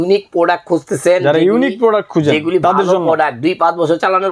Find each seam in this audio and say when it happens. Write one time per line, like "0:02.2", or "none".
none